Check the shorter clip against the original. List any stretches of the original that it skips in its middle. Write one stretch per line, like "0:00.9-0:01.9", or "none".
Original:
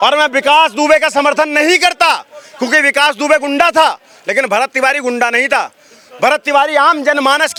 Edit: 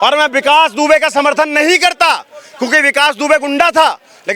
none

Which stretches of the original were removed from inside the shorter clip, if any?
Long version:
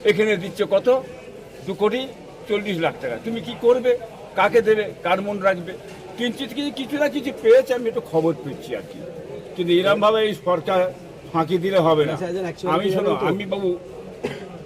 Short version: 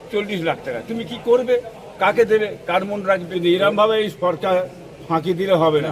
0:05.7-0:09.5

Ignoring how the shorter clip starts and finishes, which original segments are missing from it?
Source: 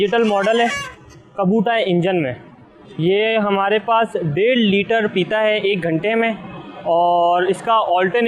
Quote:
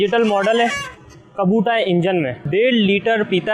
0:02.4-0:04.3

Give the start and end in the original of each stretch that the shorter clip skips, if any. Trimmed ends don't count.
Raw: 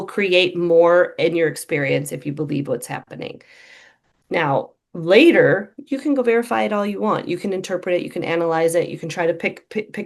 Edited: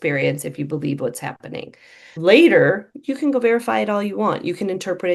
0:03.7-0:04.8

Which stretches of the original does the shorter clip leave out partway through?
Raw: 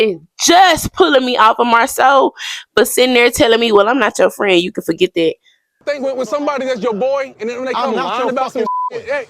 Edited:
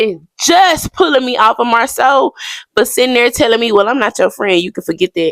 none

